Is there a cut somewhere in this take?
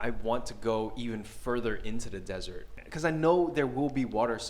yes; 1 cut; at 2.8 s

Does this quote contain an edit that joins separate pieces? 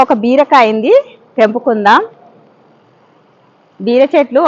no; 0 cuts

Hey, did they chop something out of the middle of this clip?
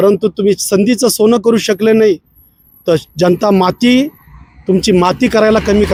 no; 0 cuts

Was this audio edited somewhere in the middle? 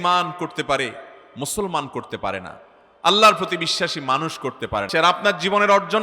yes; 1 cut; at 4.9 s

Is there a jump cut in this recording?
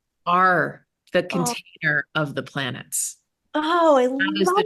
no; 0 cuts

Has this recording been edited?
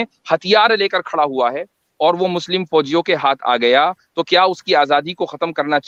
no; 0 cuts

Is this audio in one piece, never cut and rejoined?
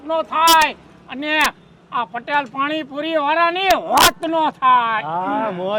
yes; 0 cuts

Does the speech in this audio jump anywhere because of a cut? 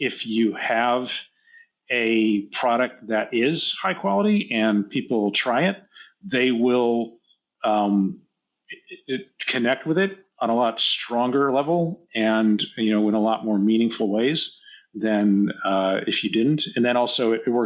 no; 0 cuts

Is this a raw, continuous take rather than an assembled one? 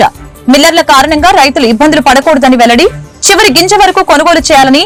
yes; 0 cuts

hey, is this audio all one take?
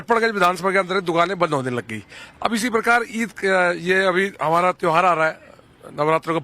no; 1 cut; at 5.1 s

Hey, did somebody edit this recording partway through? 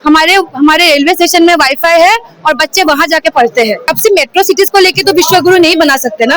yes; 1 cut; at 3.8 s

